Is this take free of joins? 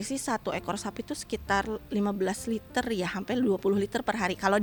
yes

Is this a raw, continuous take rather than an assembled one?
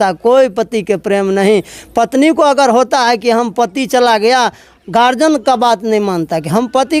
yes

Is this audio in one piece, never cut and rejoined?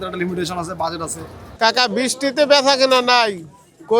no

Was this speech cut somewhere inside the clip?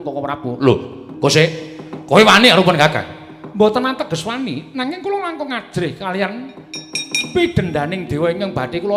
no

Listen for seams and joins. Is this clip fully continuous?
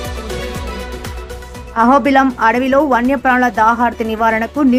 yes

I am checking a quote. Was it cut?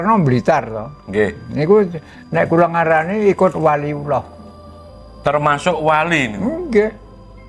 no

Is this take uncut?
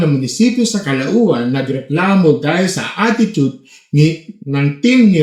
yes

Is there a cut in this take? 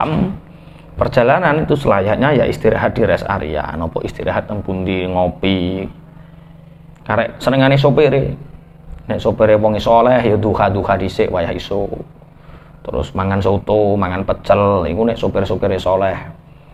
no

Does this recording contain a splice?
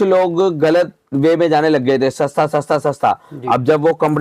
no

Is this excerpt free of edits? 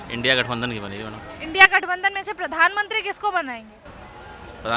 yes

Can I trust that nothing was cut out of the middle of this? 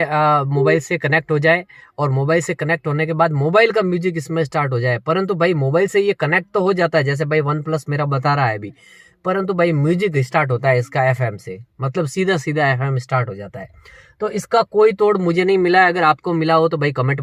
yes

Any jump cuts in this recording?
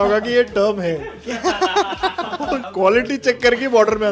yes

